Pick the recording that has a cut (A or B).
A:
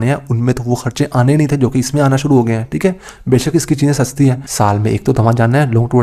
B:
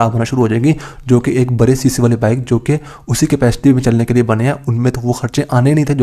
A